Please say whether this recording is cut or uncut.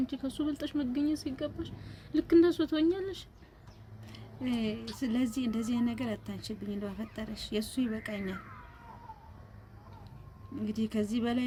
uncut